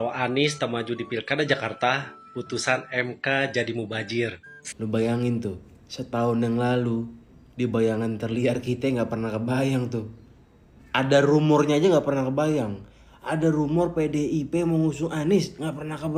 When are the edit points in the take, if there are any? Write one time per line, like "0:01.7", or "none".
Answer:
0:04.4